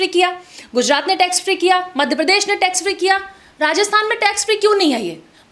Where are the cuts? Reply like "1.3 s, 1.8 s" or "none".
none